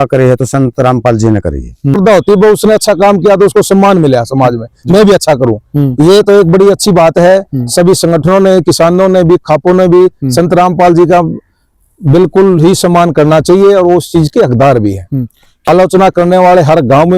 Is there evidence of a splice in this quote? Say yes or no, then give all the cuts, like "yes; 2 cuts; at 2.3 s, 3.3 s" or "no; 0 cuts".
yes; 2 cuts; at 2.0 s, 15.7 s